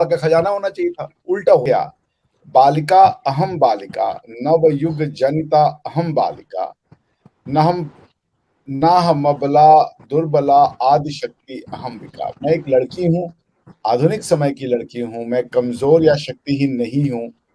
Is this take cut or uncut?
cut